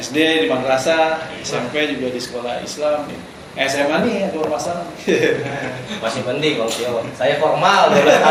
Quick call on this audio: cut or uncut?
uncut